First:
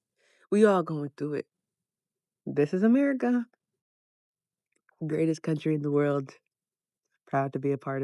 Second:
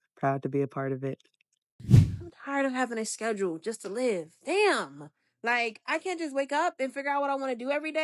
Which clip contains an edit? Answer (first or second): second